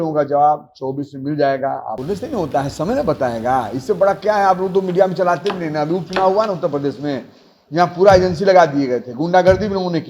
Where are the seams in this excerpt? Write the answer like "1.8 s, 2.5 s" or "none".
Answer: 2.0 s